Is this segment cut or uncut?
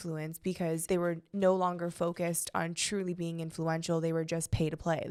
uncut